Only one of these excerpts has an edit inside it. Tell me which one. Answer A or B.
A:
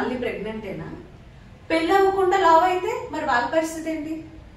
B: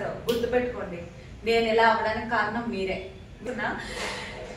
B